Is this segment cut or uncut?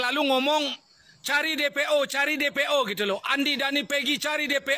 uncut